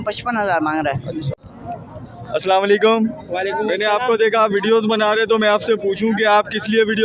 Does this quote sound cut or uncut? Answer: cut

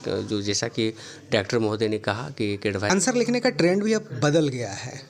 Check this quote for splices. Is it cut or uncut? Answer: cut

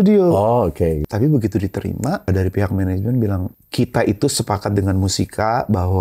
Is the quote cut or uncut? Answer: cut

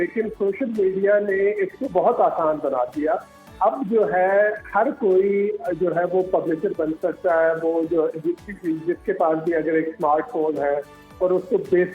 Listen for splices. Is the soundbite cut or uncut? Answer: uncut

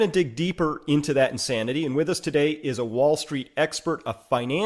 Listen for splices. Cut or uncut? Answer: uncut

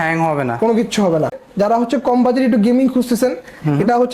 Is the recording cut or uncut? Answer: cut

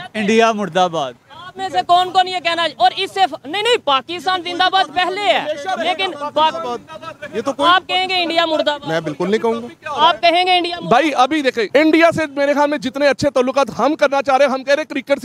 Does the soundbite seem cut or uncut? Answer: cut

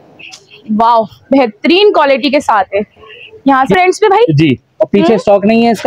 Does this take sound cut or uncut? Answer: cut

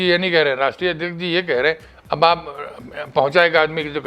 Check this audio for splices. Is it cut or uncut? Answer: uncut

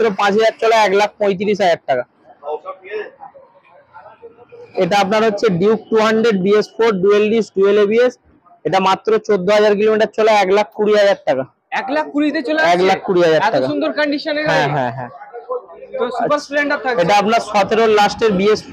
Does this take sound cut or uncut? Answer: uncut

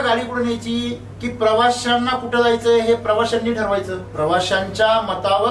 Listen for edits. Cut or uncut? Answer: cut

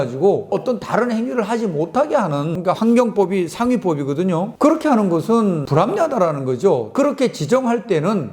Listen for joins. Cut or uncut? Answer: cut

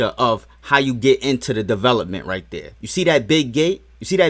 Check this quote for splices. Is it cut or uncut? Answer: uncut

